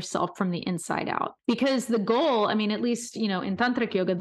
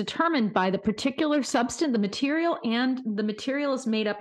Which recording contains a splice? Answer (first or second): first